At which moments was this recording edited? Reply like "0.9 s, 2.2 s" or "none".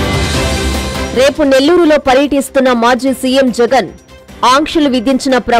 1.0 s